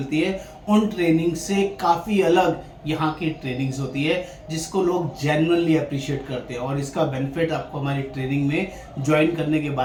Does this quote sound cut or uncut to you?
uncut